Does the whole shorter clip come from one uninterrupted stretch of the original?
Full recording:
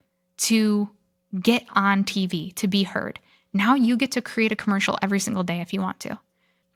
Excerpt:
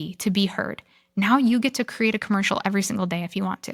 yes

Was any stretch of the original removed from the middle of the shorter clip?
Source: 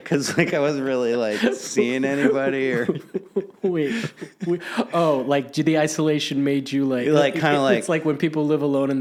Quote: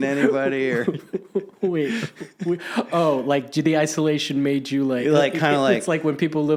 no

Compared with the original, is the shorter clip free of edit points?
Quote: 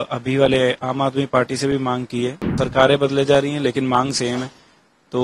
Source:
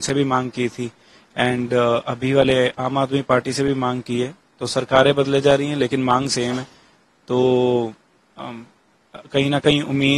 no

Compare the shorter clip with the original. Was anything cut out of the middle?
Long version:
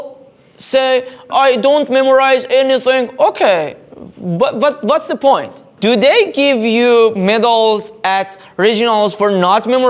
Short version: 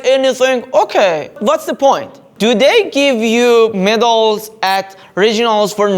yes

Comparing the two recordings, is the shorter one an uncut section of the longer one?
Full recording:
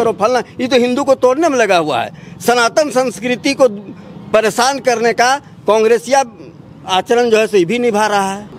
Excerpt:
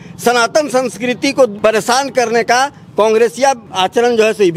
no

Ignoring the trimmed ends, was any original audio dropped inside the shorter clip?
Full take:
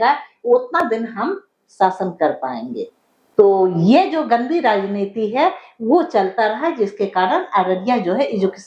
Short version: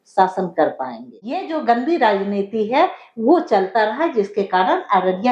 yes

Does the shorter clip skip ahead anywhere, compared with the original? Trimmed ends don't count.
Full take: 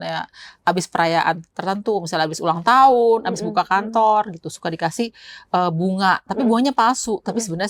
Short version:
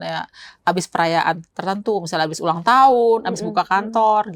no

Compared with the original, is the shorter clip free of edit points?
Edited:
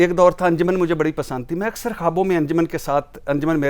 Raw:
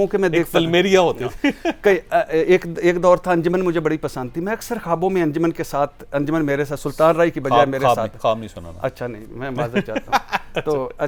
yes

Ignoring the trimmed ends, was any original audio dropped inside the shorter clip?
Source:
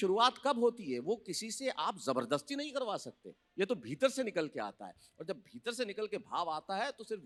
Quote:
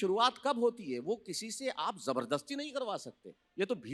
no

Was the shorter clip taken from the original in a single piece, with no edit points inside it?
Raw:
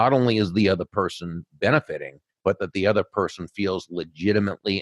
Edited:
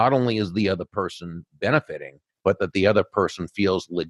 yes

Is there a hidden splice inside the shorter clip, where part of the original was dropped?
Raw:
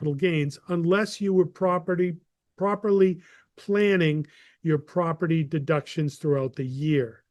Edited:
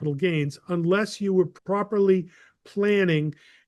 yes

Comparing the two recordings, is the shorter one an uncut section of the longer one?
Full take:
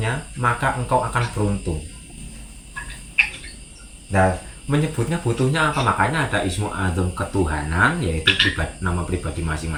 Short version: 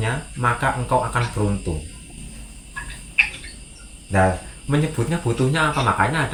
yes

